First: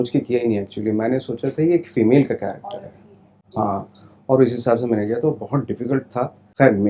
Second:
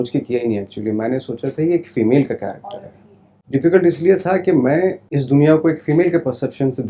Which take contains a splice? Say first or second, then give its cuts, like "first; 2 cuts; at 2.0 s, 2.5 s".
second; 1 cut; at 3.3 s